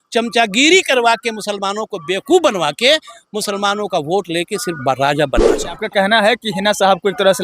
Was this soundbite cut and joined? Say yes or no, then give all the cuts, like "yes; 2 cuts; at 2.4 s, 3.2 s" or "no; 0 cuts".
yes; 1 cut; at 5.8 s